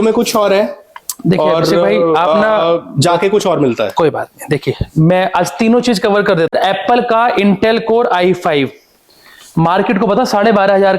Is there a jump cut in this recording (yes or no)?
yes